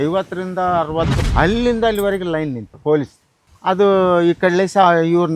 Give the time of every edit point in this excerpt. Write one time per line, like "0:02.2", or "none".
0:01.2
0:02.7